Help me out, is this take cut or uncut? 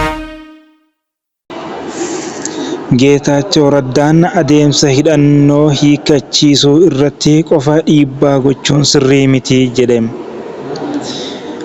uncut